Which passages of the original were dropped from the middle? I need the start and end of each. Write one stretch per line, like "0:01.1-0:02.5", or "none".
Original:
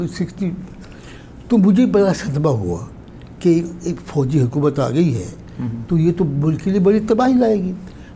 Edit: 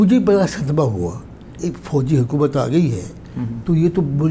0:03.2-0:03.7